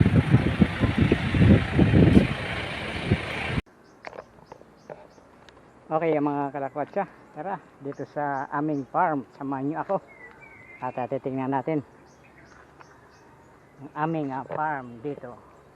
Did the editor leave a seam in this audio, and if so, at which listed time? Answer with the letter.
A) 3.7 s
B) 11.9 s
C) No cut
A